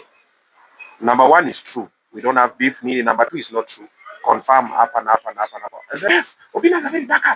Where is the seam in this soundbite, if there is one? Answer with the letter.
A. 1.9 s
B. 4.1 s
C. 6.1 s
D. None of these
C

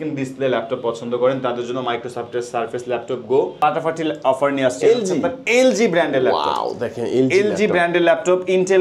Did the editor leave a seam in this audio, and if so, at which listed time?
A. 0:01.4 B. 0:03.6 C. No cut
B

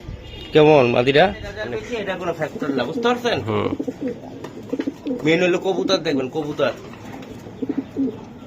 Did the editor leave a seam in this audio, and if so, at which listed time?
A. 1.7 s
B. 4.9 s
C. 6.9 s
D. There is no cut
A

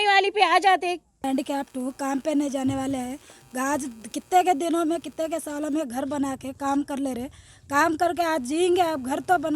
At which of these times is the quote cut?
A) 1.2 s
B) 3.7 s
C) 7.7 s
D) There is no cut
A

